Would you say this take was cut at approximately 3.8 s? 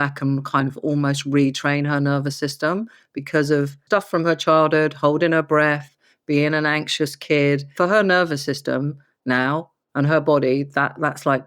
yes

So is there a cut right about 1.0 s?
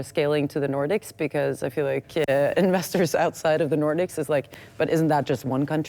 no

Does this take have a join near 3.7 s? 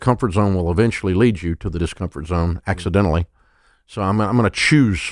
no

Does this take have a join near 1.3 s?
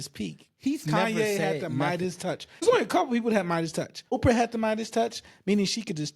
no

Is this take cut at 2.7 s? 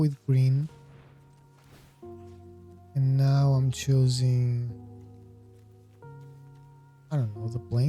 yes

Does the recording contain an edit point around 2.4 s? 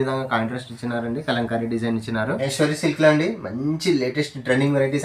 yes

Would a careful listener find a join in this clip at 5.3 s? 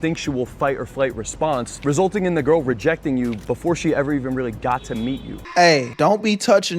yes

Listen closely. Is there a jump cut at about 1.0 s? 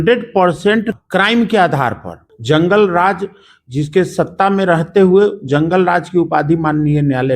yes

